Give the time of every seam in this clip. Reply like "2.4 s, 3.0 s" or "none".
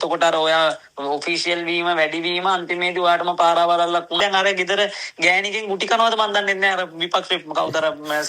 4.2 s